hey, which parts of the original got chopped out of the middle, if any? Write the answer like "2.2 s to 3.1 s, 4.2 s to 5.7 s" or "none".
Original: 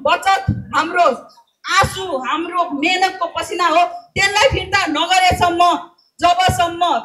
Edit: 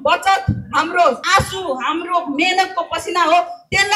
1.2 s to 1.7 s

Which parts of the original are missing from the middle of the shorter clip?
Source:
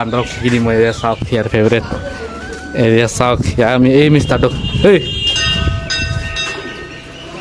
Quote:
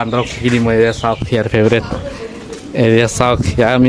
none

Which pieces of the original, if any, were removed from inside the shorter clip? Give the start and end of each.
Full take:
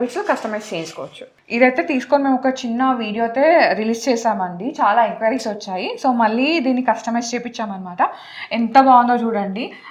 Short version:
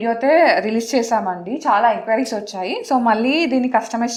none

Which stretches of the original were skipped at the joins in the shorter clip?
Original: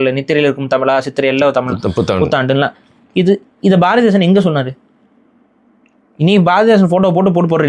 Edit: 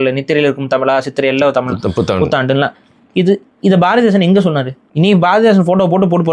4.8 s to 6.0 s

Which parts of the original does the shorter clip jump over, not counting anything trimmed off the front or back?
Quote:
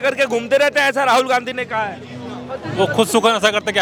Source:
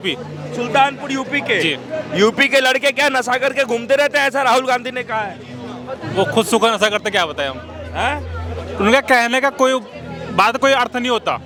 none

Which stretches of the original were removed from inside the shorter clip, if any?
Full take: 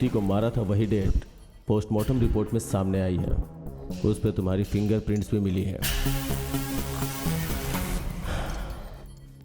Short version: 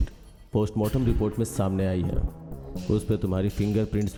none

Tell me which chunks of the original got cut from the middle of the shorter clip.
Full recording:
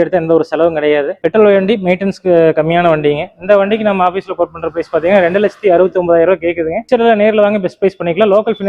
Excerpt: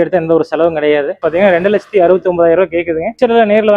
1.1 s to 4.8 s

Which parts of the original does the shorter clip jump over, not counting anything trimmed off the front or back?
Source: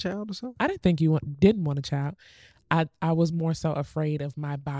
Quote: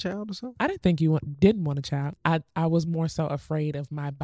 2.1 s to 2.6 s

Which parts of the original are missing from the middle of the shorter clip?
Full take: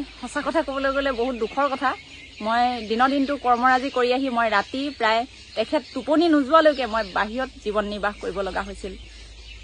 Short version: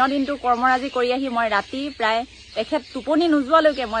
none

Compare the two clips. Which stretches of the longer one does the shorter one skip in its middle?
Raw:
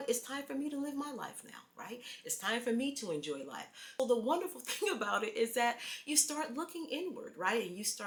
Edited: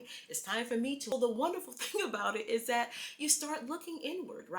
3.0 s to 3.9 s

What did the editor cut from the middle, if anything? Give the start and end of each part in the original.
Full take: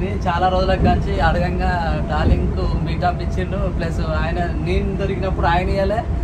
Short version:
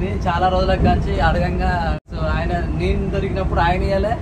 2.0 s to 3.9 s

